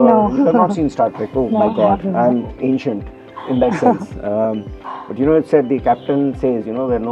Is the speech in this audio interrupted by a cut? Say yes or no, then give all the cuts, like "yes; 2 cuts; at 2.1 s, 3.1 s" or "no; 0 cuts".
no; 0 cuts